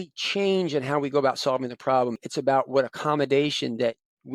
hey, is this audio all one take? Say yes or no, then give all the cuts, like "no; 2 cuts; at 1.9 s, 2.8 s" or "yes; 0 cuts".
no; 1 cut; at 2.2 s